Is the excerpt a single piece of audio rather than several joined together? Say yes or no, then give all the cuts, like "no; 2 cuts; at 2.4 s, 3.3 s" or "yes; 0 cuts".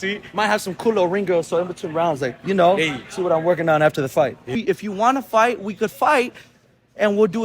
no; 1 cut; at 4.5 s